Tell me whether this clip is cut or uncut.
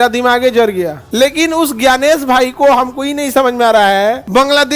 cut